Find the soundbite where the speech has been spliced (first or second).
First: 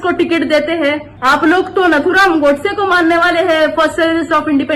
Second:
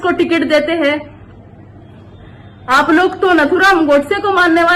first